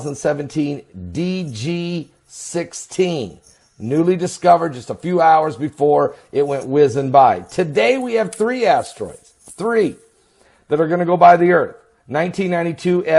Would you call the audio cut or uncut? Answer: cut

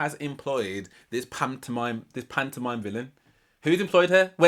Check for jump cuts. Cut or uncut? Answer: uncut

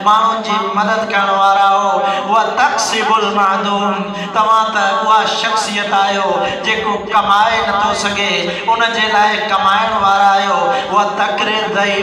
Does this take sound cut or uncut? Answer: uncut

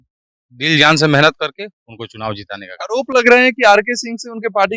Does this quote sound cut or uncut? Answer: uncut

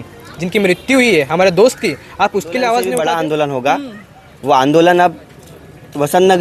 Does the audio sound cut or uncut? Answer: cut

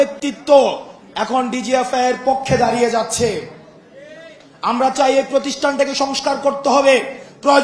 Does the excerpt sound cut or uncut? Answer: uncut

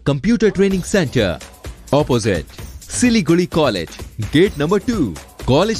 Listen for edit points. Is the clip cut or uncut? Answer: uncut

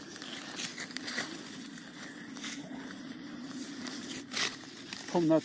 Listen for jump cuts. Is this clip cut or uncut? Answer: uncut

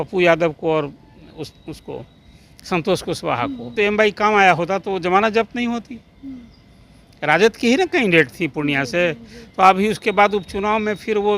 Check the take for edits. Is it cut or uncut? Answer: cut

